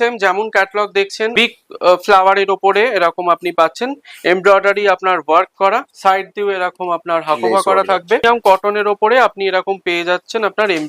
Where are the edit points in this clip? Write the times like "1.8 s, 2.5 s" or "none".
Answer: 1.3 s, 8.2 s